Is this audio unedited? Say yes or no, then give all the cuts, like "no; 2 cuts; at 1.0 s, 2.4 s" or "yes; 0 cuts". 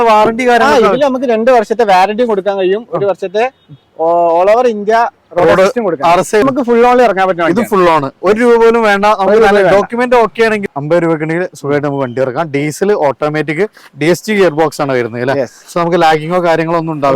no; 2 cuts; at 6.4 s, 10.6 s